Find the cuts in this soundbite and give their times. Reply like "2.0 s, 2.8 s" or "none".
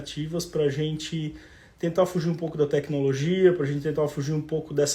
none